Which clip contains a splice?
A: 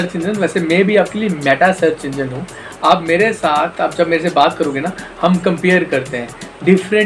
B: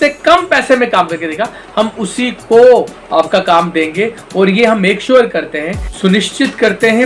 B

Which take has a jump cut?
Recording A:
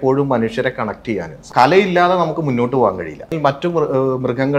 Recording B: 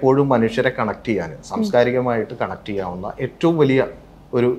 A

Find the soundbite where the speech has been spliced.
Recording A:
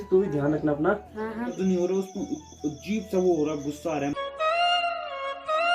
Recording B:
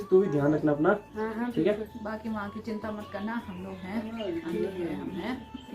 A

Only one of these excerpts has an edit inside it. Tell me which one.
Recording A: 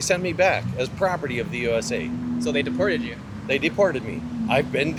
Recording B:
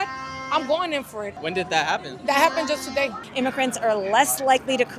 B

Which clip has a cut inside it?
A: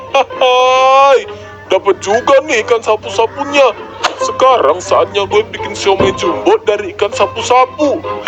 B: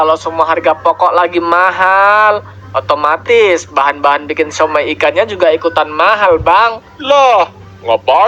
B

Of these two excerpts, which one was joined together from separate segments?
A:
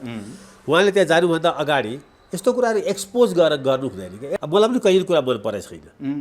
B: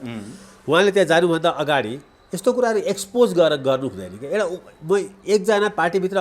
A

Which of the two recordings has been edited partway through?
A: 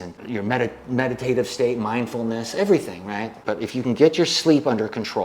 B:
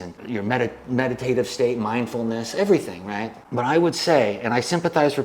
A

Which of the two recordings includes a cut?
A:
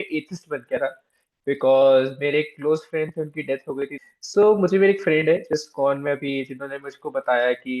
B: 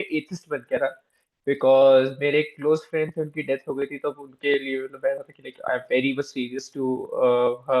A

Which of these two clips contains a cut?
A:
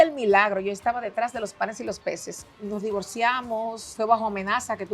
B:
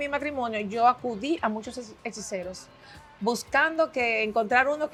A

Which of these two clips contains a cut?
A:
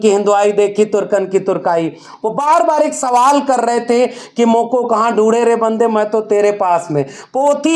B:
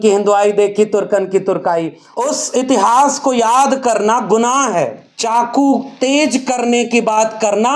B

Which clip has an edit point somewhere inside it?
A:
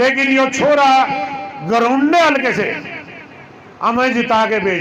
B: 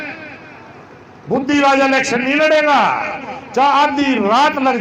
B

